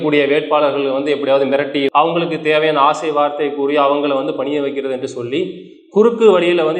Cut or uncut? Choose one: cut